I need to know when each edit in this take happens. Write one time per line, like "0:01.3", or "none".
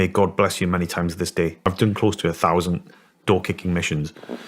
0:01.6